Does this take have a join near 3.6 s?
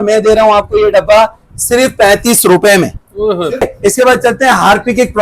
yes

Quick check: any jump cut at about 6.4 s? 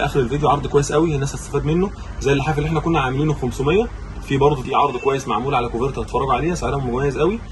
no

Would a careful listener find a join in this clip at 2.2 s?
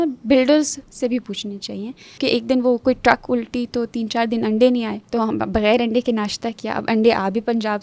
yes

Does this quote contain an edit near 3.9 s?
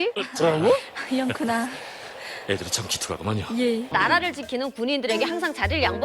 yes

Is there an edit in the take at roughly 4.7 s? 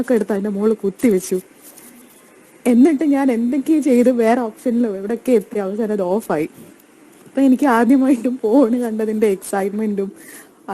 no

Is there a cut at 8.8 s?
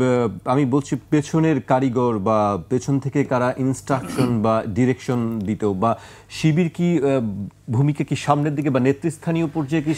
no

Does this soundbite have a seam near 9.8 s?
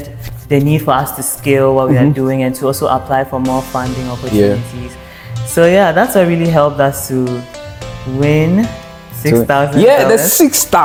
no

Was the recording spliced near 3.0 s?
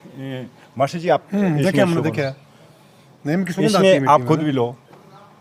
no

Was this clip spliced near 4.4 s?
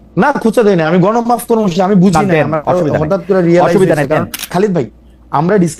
yes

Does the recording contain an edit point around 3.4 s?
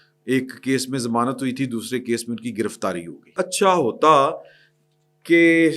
yes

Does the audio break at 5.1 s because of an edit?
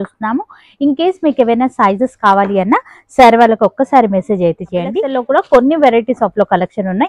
yes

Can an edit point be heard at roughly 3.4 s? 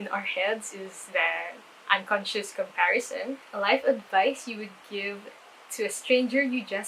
yes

